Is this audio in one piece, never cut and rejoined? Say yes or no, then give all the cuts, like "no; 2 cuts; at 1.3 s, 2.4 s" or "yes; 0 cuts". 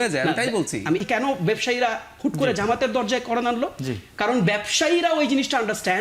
no; 1 cut; at 1.0 s